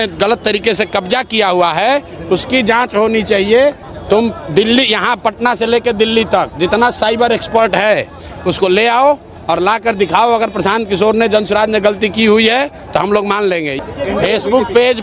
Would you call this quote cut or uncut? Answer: cut